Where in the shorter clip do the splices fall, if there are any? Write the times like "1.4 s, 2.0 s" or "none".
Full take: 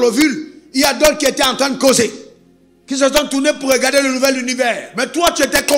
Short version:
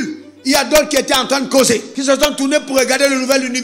1.9 s